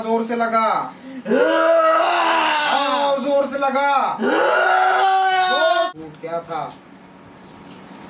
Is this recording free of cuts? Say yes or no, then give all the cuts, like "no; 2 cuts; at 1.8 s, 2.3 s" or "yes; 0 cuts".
no; 1 cut; at 5.9 s